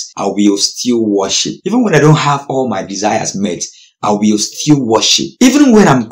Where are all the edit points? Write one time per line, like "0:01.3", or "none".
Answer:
none